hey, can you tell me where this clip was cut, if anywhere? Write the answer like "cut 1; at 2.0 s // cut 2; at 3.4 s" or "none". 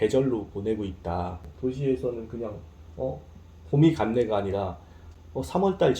cut 1; at 1.5 s